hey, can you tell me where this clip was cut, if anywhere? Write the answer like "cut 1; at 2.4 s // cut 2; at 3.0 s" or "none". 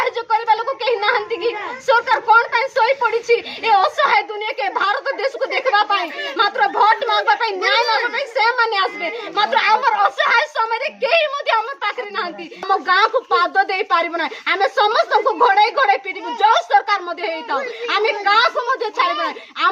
cut 1; at 12.7 s